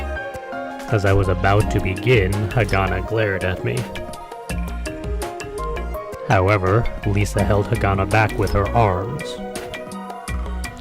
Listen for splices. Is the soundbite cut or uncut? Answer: cut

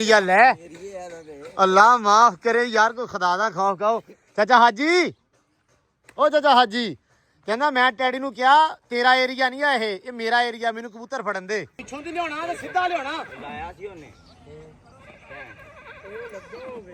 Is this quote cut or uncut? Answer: cut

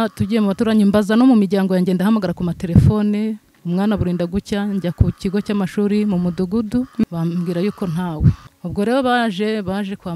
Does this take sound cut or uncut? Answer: cut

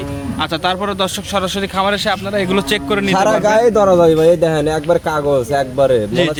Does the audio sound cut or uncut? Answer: uncut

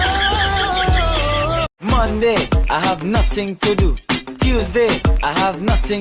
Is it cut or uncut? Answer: cut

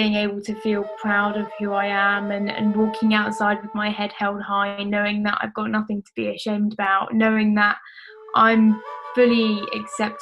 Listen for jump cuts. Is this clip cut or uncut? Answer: uncut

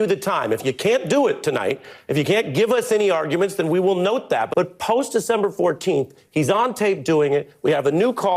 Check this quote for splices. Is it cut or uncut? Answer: cut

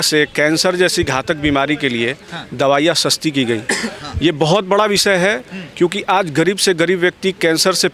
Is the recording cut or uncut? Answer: uncut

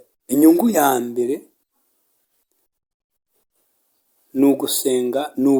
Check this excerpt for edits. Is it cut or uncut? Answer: uncut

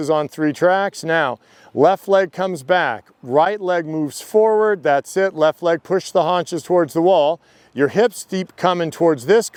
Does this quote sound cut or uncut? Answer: uncut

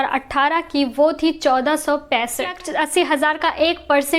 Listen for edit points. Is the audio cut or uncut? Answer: cut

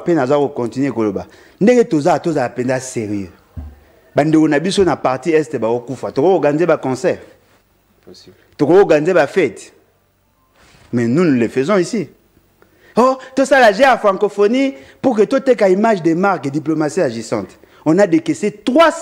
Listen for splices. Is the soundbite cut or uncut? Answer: uncut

